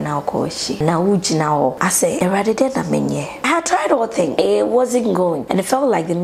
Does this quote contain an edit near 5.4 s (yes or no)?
yes